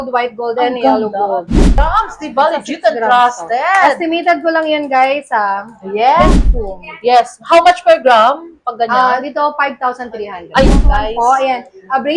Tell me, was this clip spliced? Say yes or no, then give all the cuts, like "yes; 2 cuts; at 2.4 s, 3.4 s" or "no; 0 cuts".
yes; 3 cuts; at 1.8 s, 6.3 s, 10.7 s